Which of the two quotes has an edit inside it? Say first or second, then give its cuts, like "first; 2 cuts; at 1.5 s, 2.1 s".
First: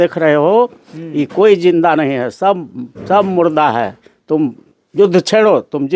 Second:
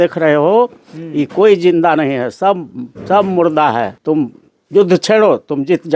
second; 1 cut; at 3.9 s